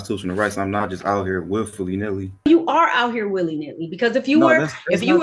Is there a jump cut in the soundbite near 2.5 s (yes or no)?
yes